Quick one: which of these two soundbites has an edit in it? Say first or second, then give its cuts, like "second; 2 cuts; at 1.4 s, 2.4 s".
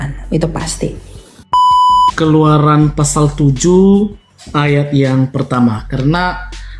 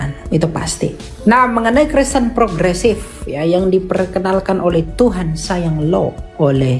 second; 1 cut; at 1.1 s